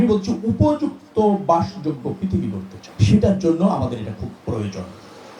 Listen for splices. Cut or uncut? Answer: uncut